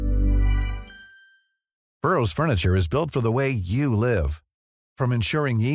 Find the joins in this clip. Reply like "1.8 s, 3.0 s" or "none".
1.9 s

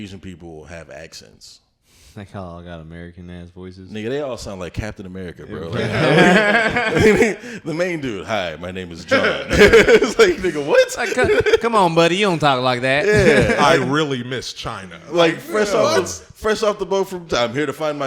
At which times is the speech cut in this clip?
none

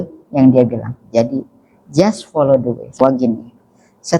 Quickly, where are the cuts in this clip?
3.0 s

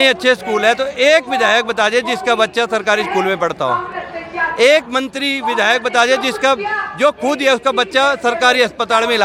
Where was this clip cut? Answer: none

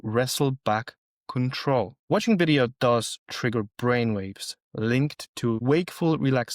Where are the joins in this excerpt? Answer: 2.0 s, 5.6 s

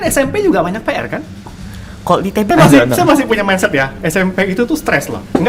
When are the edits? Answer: 2.5 s

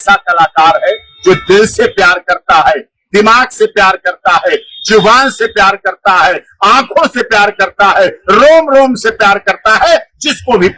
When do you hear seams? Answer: none

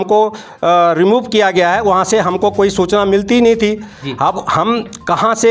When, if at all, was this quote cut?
none

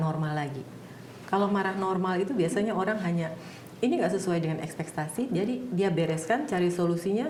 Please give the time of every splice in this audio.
none

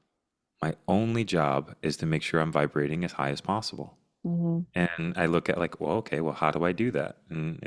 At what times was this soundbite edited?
none

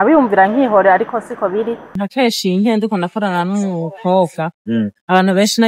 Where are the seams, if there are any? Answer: 1.9 s

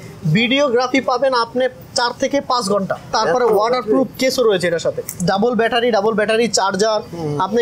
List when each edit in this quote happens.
3.2 s, 5.2 s

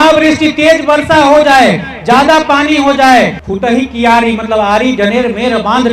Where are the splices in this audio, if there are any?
3.4 s

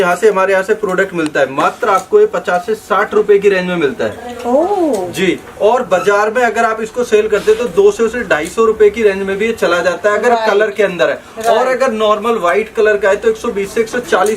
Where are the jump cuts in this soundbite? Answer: none

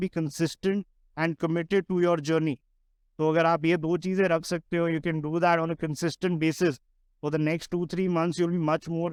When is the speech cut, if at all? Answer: none

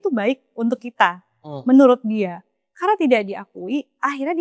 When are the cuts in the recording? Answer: none

